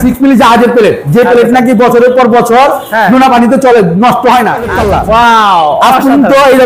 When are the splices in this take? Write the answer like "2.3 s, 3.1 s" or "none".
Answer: 4.8 s